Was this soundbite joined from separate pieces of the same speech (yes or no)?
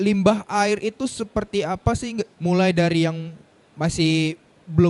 yes